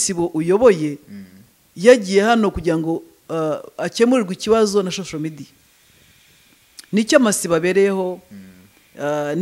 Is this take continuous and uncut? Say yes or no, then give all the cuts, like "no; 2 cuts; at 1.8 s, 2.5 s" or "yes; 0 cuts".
yes; 0 cuts